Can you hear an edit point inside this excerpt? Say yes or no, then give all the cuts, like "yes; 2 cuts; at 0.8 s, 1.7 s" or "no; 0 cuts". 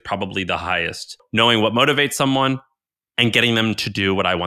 yes; 1 cut; at 1.2 s